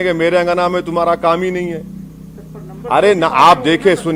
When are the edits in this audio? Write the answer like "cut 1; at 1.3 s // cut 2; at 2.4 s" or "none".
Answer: none